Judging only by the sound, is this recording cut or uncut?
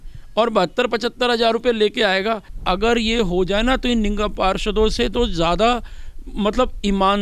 cut